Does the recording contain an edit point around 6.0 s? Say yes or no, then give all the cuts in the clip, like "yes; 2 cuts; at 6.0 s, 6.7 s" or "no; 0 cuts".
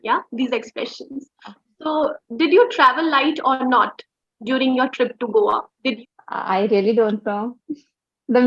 yes; 1 cut; at 6.0 s